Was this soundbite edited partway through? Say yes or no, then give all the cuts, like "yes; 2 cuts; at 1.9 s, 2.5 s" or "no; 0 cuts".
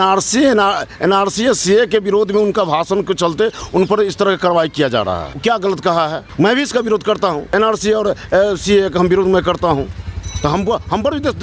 yes; 3 cuts; at 5.3 s, 6.2 s, 7.5 s